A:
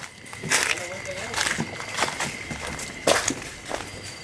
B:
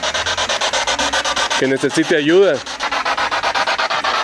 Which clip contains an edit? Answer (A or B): B